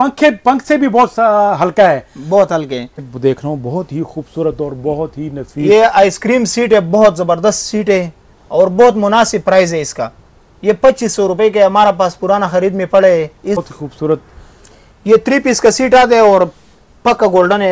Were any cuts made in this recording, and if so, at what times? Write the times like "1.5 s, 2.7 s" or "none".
3.0 s, 13.6 s